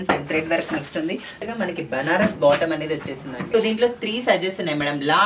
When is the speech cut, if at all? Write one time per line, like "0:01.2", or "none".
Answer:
0:01.5
0:03.3